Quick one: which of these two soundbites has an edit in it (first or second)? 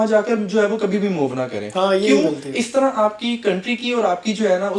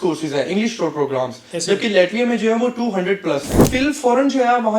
second